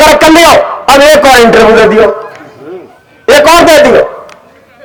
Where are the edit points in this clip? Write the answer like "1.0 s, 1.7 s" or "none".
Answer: none